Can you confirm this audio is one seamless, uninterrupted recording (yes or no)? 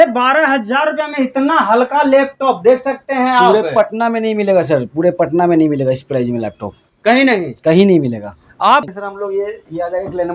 no